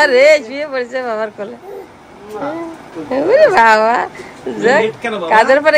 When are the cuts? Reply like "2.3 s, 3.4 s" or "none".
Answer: 2.9 s